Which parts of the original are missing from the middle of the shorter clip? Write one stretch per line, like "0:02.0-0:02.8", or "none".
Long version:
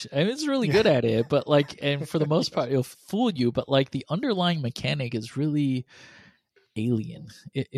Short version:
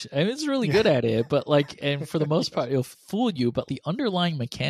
0:03.7-0:03.9